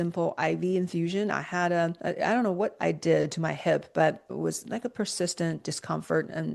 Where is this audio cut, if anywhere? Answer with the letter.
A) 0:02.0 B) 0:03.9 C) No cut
A